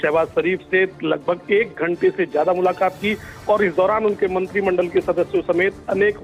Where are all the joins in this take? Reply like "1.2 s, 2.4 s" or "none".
none